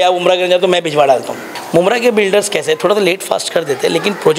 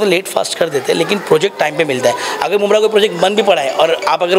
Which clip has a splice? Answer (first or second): first